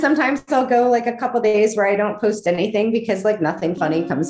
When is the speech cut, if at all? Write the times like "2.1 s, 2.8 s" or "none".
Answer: none

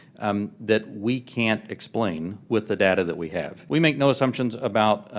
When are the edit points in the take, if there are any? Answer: 3.5 s

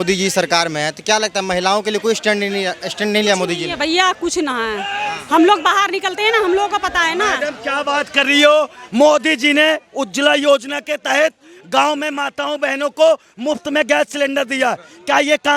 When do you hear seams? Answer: none

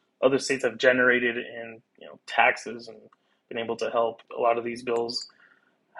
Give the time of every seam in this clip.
4.2 s

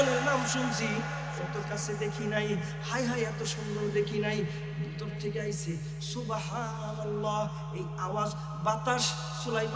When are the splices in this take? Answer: none

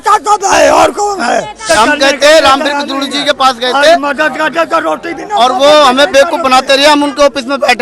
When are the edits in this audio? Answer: 1.7 s

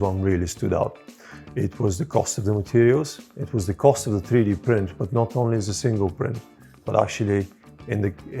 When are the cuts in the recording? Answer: none

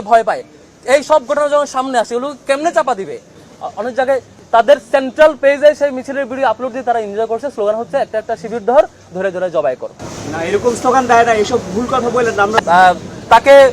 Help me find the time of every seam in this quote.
3.4 s, 12.5 s

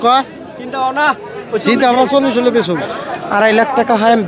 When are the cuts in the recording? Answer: 2.9 s

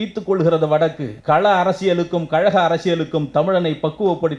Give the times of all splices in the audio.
1.1 s

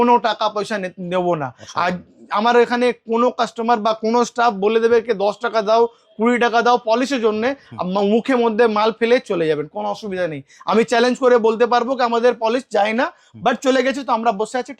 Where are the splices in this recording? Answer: none

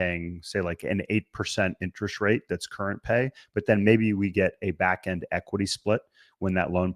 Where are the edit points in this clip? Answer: none

